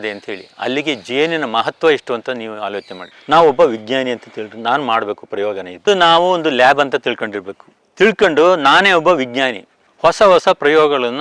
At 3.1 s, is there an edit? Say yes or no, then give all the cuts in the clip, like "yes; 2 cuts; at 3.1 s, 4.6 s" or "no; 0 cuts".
yes; 1 cut; at 3.1 s